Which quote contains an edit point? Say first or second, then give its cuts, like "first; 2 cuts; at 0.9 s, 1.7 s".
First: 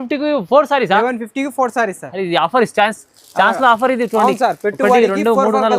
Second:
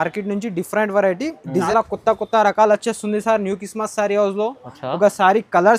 second; 1 cut; at 1.7 s